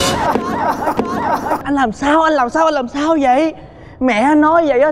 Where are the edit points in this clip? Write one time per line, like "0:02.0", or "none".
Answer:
0:01.6